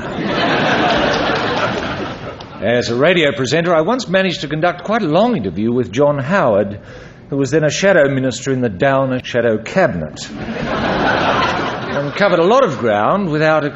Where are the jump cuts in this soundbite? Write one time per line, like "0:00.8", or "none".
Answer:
0:09.2